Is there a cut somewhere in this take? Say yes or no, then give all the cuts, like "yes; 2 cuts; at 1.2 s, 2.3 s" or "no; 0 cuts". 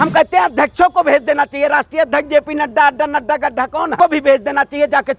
yes; 1 cut; at 3.9 s